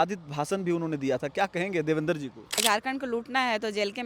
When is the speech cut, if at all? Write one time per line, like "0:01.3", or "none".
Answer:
0:02.6